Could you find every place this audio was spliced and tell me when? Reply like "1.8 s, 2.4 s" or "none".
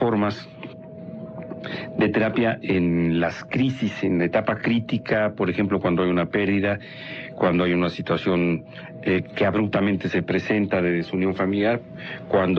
none